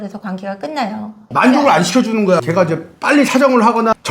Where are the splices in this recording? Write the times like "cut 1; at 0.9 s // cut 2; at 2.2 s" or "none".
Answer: cut 1; at 1.2 s // cut 2; at 2.4 s